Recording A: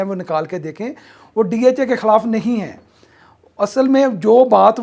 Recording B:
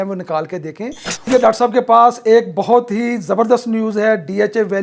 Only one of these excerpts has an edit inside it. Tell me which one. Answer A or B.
B